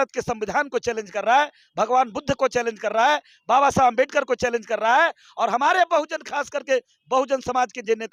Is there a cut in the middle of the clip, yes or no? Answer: no